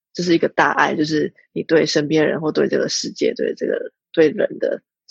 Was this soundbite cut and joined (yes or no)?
no